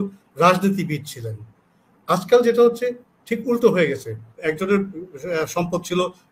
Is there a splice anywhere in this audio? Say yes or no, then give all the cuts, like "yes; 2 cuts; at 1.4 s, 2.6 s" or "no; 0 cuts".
yes; 1 cut; at 4.3 s